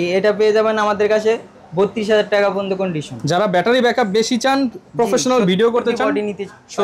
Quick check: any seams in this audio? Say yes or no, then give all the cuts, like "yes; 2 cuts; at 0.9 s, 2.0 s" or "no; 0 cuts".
no; 0 cuts